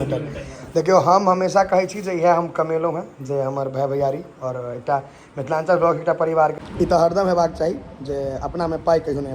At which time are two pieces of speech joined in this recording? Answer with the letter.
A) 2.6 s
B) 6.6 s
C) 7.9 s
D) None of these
B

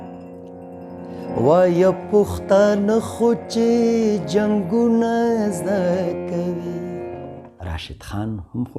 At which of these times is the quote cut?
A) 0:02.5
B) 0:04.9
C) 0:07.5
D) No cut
C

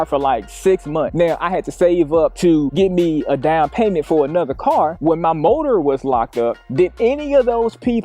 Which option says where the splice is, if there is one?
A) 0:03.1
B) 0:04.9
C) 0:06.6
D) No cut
B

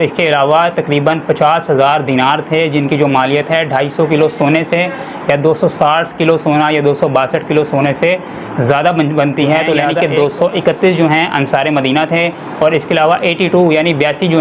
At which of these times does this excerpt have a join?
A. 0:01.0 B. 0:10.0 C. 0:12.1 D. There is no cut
B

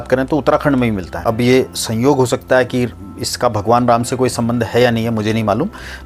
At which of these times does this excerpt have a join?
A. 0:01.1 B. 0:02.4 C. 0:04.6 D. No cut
A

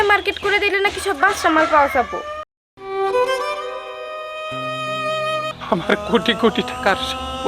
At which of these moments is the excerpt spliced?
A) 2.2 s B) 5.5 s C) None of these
B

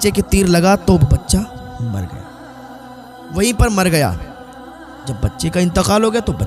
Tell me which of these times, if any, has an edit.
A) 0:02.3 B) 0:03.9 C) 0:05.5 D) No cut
D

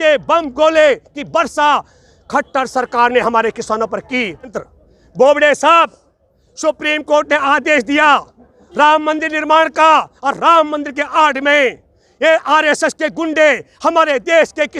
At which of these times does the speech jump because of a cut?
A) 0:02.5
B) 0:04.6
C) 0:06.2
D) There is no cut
B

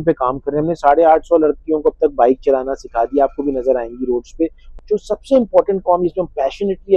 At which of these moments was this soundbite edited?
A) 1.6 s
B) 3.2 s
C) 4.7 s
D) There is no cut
C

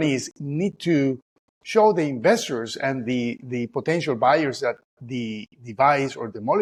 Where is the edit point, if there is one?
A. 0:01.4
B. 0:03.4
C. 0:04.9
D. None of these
D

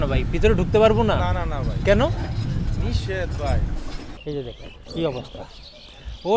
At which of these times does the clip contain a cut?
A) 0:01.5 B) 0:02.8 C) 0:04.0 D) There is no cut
C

